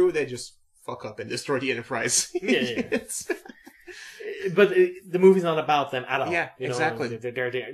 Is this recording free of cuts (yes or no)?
yes